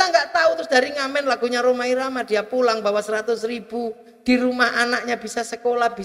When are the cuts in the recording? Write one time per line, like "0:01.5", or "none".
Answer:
none